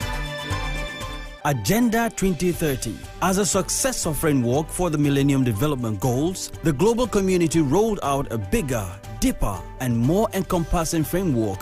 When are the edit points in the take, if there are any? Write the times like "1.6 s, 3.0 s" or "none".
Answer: 1.3 s